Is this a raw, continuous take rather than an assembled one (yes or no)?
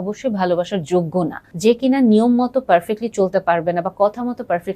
no